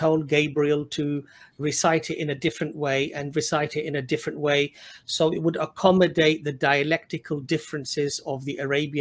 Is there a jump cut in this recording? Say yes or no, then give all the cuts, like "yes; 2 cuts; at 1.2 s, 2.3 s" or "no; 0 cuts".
no; 0 cuts